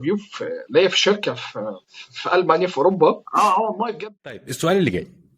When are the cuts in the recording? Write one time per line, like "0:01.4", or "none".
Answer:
0:04.0